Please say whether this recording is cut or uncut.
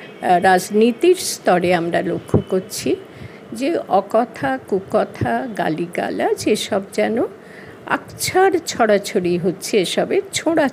uncut